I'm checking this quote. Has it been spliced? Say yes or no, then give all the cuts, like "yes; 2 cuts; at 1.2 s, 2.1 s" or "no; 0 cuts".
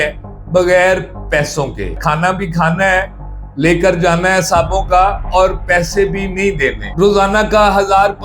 yes; 2 cuts; at 1.9 s, 6.8 s